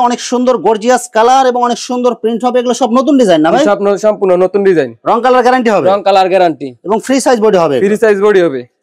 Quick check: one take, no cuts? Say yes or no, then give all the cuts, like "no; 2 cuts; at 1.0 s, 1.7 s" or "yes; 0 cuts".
yes; 0 cuts